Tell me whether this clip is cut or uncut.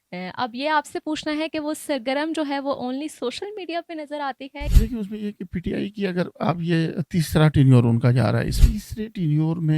cut